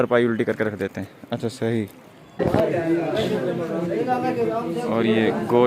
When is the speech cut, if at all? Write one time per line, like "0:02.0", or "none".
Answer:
0:02.4